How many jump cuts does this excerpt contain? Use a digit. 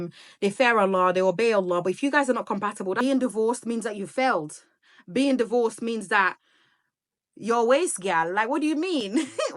1